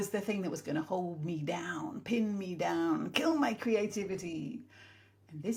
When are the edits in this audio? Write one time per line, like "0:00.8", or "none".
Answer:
none